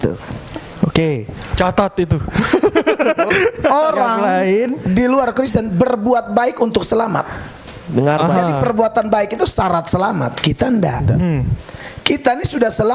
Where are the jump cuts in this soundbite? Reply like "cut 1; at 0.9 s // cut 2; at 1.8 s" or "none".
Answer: cut 1; at 3.3 s